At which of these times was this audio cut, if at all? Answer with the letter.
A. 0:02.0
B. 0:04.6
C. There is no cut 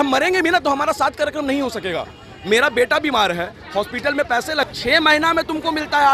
B